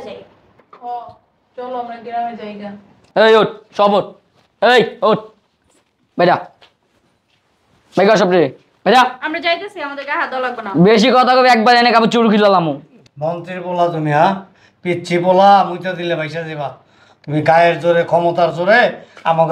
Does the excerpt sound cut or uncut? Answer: uncut